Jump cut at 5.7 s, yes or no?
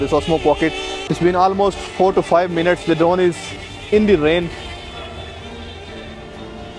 no